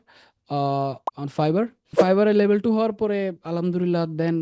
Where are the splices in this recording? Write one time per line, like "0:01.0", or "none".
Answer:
0:01.9